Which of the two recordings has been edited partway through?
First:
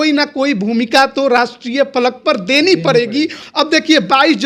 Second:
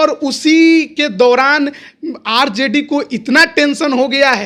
first; 1 cut; at 3.4 s

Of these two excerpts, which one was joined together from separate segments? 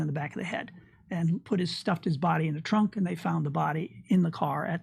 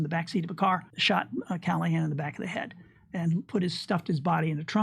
second; 1 cut; at 0.9 s

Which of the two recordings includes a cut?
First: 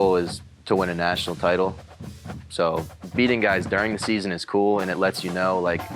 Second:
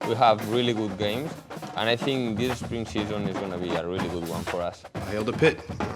second; 1 cut; at 5.0 s

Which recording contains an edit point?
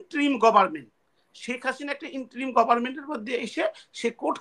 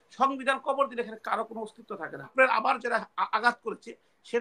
second; 1 cut; at 2.3 s

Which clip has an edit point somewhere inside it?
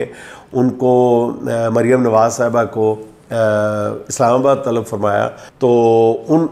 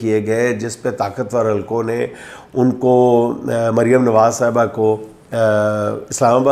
first; 1 cut; at 5.4 s

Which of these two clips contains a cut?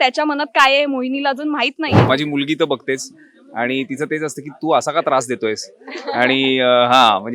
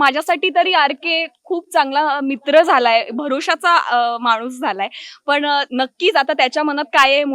first; 1 cut; at 2.1 s

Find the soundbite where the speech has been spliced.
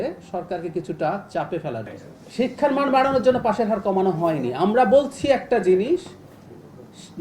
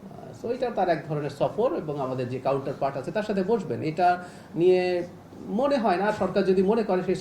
first; 1 cut; at 1.9 s

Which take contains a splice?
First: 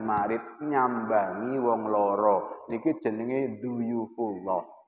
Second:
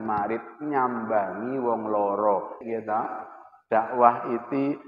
second; 1 cut; at 2.6 s

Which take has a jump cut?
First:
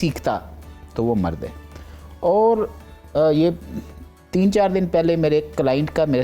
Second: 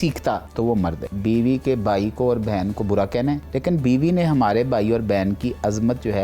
second; 2 cuts; at 0.9 s, 3.5 s

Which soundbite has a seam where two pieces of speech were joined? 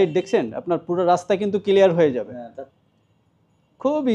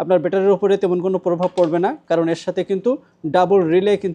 first; 1 cut; at 2.7 s

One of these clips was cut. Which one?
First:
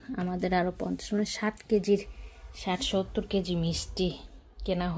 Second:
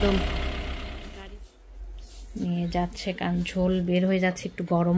second; 1 cut; at 1.1 s

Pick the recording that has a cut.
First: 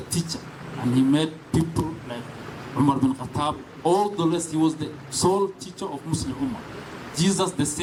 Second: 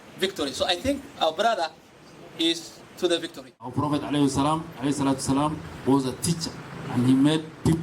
second; 1 cut; at 3.7 s

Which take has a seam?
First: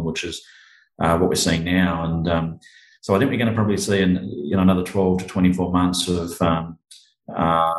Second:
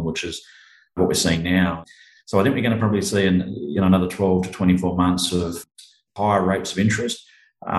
second; 3 cuts; at 1.0 s, 1.9 s, 5.6 s

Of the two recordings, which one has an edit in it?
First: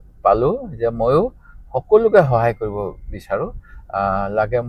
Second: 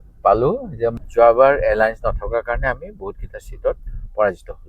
second; 1 cut; at 1.0 s

